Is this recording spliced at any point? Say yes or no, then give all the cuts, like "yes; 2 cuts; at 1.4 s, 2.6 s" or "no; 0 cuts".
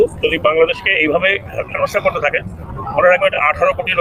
no; 0 cuts